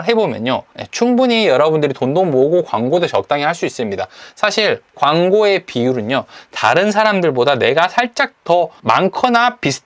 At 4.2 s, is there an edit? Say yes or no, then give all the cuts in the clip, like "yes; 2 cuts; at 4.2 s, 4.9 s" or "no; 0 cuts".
no; 1 cut; at 8.8 s